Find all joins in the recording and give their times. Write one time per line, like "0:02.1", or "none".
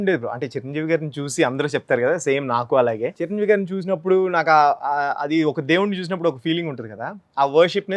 0:03.2